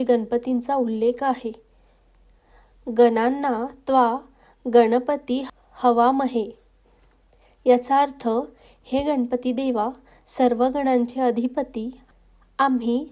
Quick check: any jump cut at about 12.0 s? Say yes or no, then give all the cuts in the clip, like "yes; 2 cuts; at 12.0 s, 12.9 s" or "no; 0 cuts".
yes; 2 cuts; at 5.6 s, 12.0 s